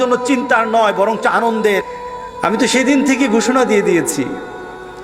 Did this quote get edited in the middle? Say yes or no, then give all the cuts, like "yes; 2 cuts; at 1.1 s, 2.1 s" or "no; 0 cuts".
yes; 1 cut; at 1.8 s